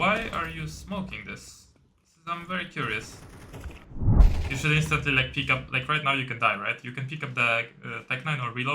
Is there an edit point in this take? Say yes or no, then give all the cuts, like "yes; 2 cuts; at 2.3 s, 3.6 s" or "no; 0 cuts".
yes; 1 cut; at 4.1 s